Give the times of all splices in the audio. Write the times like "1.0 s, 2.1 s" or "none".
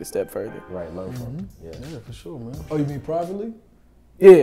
2.6 s